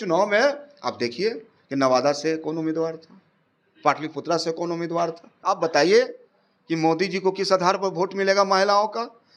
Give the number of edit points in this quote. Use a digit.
1